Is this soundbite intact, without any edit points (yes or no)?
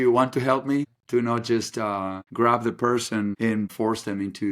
no